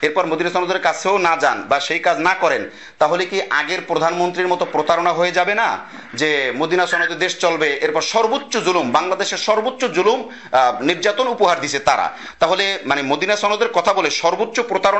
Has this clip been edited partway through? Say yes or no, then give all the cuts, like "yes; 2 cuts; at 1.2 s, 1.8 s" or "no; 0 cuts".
no; 0 cuts